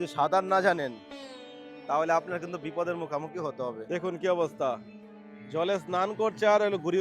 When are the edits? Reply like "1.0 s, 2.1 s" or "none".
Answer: 3.8 s